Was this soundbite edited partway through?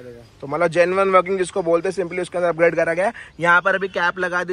no; 0 cuts

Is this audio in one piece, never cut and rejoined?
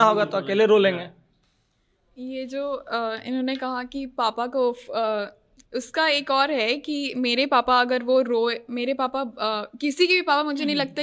yes; 0 cuts

